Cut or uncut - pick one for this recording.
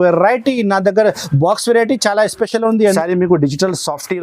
cut